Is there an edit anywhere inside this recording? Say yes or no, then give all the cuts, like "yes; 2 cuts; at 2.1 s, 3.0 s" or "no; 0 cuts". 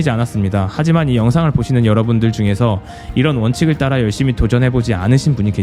no; 0 cuts